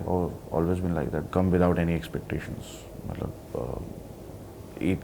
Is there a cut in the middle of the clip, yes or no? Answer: yes